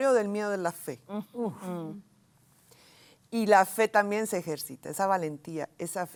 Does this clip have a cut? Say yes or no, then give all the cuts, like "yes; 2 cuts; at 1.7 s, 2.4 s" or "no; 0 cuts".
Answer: no; 0 cuts